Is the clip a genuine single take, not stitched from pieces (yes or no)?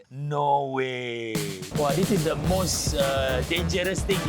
no